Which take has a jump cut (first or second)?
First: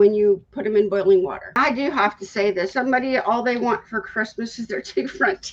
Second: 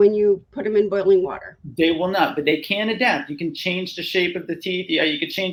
first